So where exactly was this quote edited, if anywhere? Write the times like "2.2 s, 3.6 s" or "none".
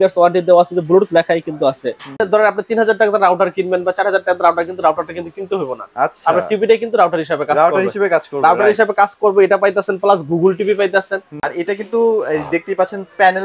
2.2 s, 11.5 s